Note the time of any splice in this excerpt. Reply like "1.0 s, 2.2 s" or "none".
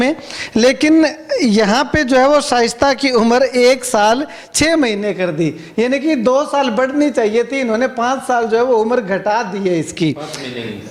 none

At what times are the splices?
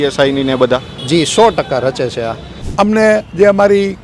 2.5 s

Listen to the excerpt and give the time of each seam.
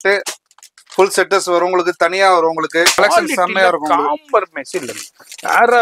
3.0 s

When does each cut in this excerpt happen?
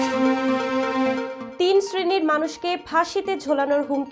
none

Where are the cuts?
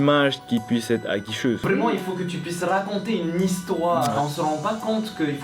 1.6 s, 4.1 s

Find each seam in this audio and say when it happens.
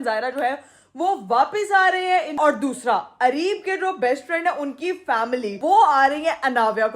2.4 s, 5.6 s

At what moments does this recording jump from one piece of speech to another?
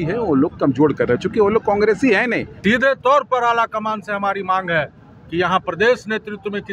2.5 s

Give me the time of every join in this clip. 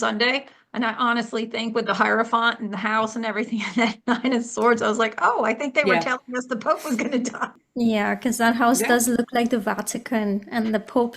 7.6 s

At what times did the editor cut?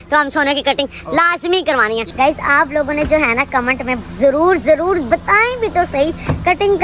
2.0 s

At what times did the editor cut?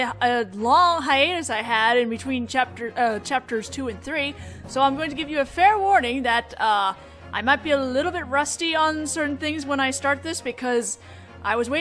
9.7 s

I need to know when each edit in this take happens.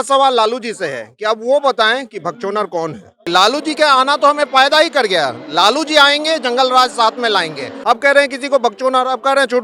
3.2 s, 7.7 s

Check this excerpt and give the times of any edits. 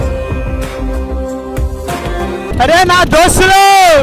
2.5 s

